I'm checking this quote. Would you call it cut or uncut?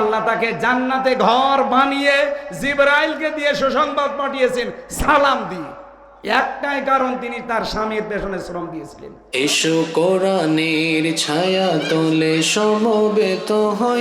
cut